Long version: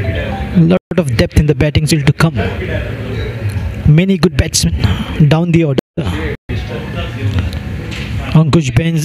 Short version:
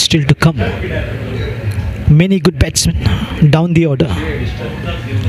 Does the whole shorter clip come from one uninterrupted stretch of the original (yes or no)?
no